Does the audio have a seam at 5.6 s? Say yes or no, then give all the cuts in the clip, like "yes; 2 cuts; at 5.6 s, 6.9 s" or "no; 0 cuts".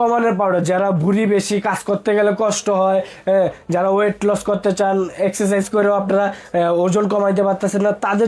no; 0 cuts